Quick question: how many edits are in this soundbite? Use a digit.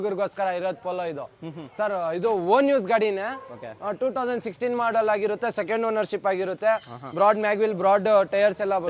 0